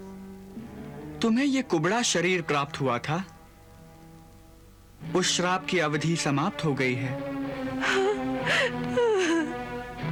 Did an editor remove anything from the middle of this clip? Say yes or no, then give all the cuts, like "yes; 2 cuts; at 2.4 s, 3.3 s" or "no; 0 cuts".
no; 0 cuts